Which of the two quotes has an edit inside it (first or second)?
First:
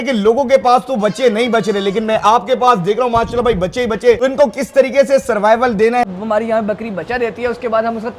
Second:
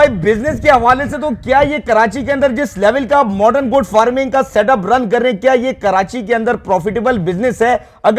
first